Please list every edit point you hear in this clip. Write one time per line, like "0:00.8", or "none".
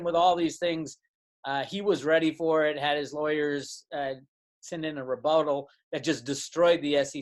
none